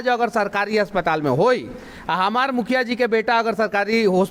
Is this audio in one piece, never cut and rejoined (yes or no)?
yes